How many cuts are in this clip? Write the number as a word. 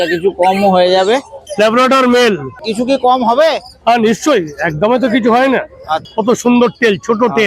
three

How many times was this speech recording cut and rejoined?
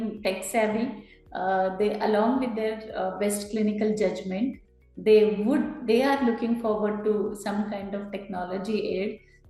zero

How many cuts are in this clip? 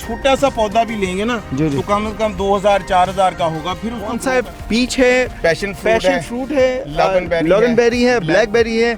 one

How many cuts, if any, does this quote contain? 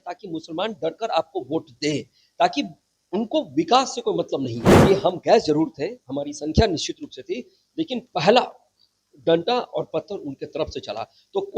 one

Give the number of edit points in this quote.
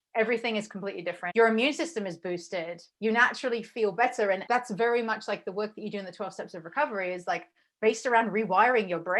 three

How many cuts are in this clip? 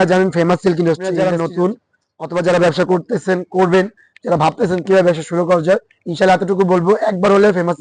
one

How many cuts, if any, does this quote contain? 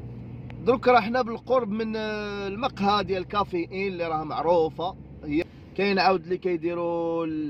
one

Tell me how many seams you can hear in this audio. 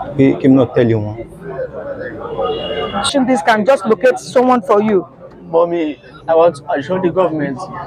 one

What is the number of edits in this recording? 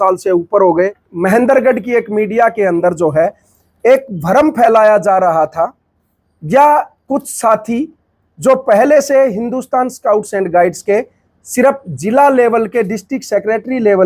one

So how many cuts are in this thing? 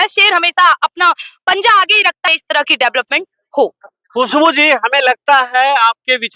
one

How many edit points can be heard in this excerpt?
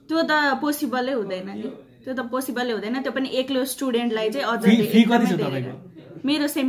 zero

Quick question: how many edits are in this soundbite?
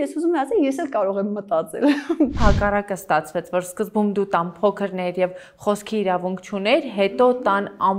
one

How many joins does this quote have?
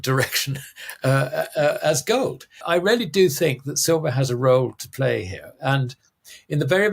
one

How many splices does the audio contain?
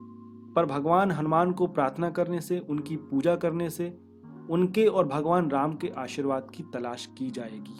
zero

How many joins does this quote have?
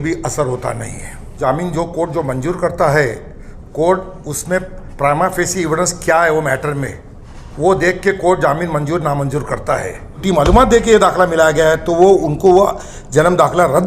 two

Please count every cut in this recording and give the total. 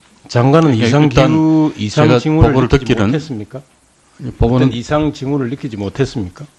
zero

